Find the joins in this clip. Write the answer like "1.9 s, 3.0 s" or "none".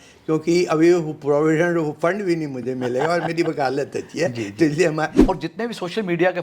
5.2 s